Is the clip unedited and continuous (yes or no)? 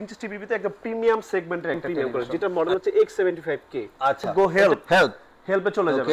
no